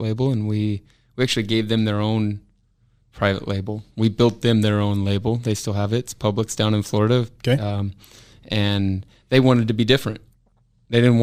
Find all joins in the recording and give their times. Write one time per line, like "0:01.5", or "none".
none